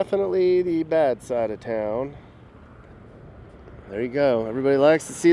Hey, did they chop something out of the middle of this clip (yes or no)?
yes